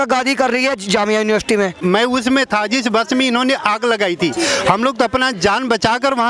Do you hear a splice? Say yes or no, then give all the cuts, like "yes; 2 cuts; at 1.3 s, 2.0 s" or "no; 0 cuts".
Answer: yes; 1 cut; at 1.7 s